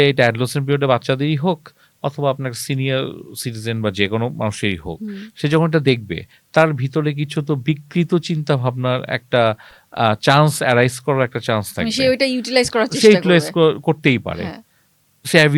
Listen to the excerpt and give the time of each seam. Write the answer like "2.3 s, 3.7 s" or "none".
none

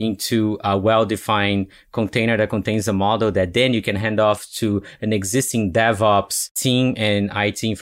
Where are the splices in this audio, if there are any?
6.4 s

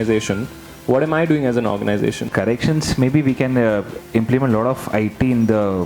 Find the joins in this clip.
2.3 s

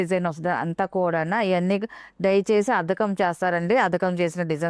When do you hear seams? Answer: none

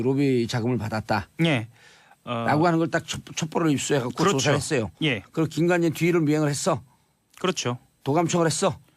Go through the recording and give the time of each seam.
7.2 s

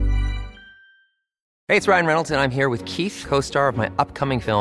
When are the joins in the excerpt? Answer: 1.5 s

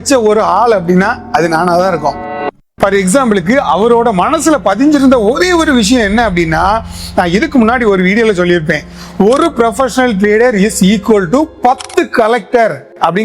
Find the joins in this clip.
2.5 s

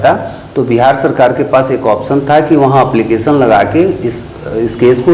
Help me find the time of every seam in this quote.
none

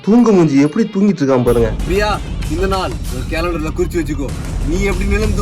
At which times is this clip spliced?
1.8 s

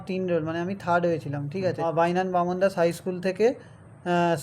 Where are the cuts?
1.8 s

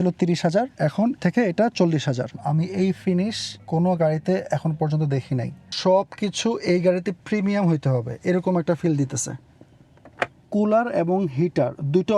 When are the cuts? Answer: 1.1 s, 2.4 s, 3.5 s, 5.7 s, 10.4 s

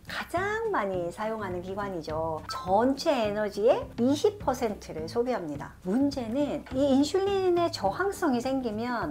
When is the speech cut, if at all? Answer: 5.7 s

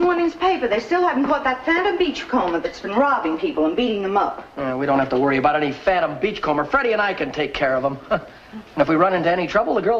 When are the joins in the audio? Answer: 7.7 s

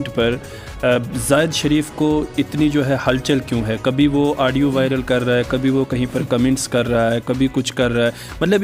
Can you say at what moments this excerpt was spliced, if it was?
none

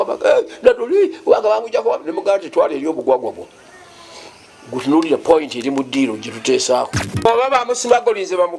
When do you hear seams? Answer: 7.3 s

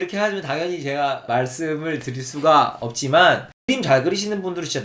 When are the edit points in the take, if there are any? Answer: 3.5 s

